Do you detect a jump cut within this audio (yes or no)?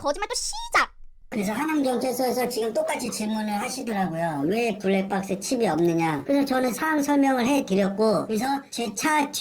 yes